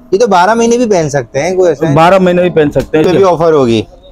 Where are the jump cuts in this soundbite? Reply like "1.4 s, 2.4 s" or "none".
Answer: 3.0 s